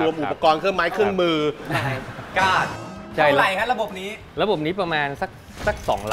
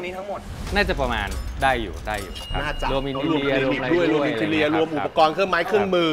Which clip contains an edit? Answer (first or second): first